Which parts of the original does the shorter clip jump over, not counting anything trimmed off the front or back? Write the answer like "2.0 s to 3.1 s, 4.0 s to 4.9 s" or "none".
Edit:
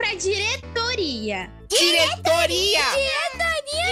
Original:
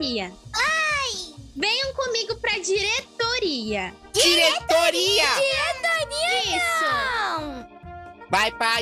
none